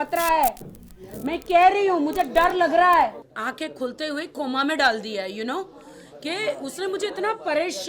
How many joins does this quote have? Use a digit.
1